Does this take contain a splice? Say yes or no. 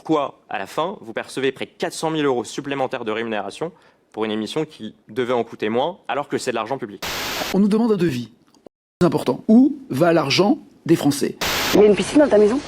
yes